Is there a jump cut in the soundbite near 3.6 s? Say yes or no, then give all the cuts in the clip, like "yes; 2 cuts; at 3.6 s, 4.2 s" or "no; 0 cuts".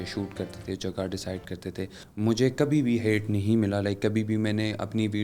no; 1 cut; at 2.0 s